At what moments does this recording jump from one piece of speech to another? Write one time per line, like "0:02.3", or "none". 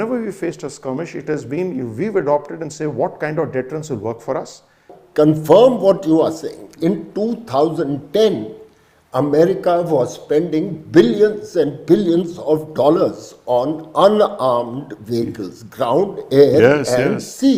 0:05.0